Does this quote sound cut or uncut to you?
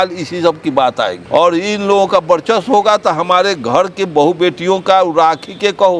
uncut